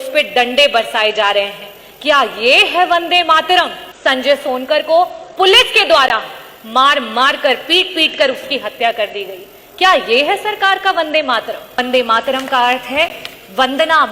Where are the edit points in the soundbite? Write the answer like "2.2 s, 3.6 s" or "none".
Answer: 3.8 s, 11.8 s